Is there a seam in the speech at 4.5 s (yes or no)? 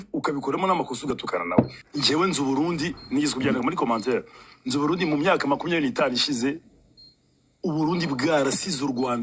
no